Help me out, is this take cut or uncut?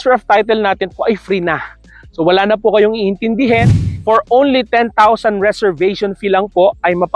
cut